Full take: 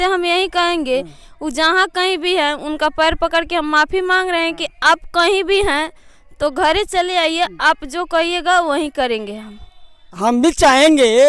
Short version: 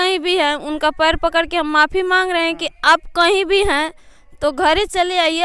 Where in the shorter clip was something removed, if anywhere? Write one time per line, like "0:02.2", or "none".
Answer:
none